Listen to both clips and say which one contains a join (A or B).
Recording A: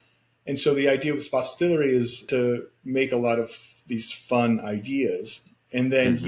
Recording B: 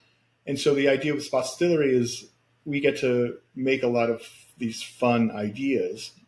A